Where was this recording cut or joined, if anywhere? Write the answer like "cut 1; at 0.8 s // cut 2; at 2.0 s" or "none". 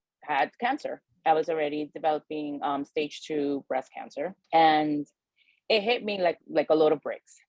cut 1; at 1.1 s // cut 2; at 4.4 s